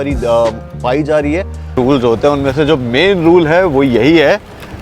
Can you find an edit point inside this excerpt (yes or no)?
yes